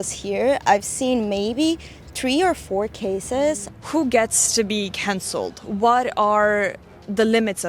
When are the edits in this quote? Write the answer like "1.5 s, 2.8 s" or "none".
3.6 s

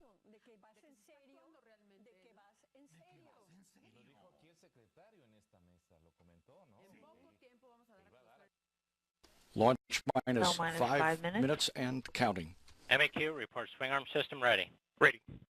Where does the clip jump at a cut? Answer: 14.2 s

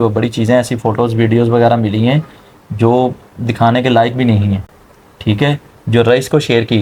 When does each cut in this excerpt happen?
none

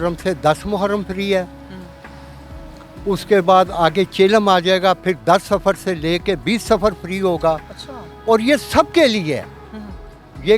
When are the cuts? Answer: none

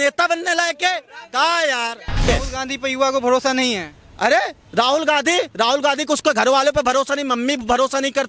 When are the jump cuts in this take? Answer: 2.3 s

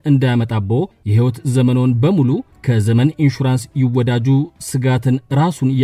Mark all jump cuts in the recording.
1.0 s, 2.5 s

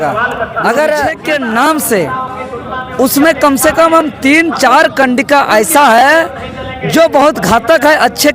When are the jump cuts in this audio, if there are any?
1.2 s

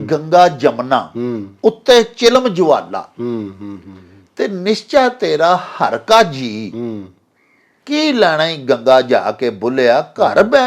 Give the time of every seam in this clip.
none

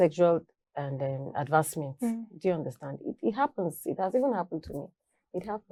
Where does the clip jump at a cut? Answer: none

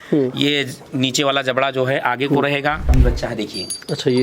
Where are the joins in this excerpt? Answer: 2.9 s

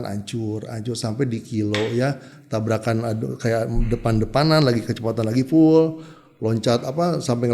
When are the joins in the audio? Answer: 2.3 s

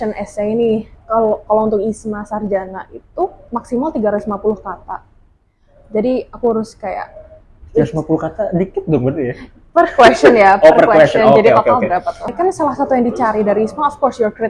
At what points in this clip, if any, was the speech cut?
3.4 s, 12.3 s

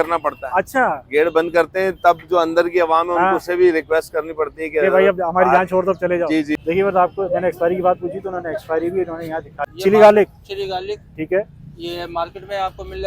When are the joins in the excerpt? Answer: 6.6 s, 9.7 s

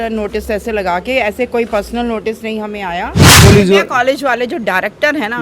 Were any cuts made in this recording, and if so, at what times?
3.4 s

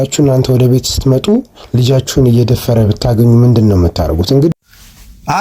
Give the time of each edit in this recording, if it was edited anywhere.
4.5 s

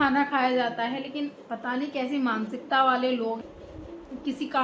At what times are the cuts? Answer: 3.4 s

